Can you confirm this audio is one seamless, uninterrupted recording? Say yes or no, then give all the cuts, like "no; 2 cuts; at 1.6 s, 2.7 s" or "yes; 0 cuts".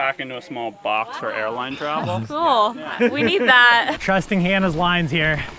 no; 1 cut; at 3.9 s